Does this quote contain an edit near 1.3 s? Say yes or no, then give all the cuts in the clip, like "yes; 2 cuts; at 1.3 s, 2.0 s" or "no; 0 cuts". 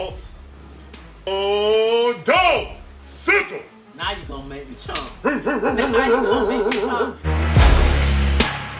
yes; 1 cut; at 1.3 s